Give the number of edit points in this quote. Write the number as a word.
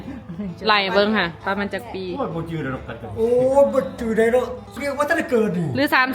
one